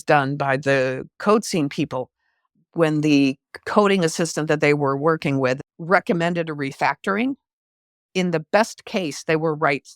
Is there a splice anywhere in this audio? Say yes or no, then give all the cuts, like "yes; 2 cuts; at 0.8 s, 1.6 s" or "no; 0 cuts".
yes; 1 cut; at 5.6 s